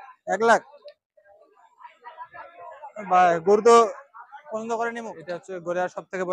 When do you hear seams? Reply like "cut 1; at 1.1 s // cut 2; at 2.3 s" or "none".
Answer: cut 1; at 5.1 s